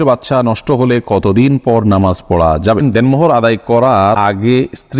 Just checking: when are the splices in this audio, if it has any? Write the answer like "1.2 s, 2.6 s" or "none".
2.8 s, 4.2 s